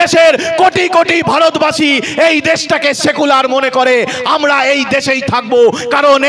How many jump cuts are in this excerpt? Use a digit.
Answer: 0